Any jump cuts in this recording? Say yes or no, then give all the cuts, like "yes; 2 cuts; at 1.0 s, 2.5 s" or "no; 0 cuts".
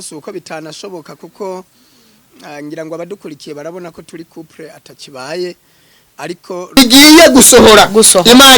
yes; 1 cut; at 6.8 s